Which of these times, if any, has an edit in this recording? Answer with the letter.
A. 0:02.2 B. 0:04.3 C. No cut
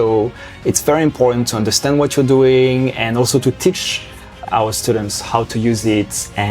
B